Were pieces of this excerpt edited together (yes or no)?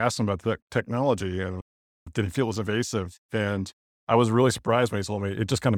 no